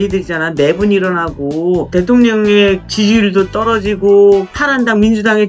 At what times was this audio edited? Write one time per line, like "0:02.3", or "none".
0:01.9
0:02.9
0:04.6